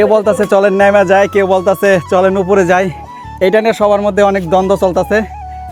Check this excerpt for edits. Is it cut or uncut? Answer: uncut